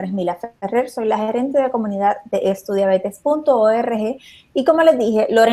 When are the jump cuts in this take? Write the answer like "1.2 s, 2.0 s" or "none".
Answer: none